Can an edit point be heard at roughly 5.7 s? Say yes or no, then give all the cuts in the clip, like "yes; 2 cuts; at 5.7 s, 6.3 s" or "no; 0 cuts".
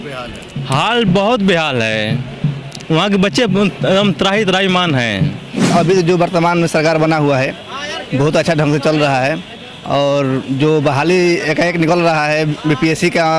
yes; 1 cut; at 5.7 s